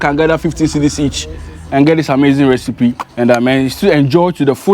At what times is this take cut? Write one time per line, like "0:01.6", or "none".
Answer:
0:03.1